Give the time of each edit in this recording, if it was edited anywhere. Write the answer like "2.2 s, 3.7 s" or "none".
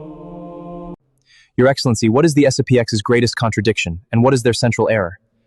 1.0 s